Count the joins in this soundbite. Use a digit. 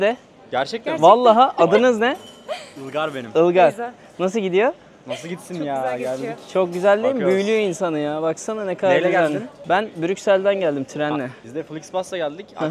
0